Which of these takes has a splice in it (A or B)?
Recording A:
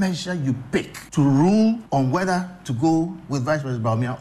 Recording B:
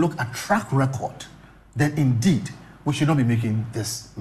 A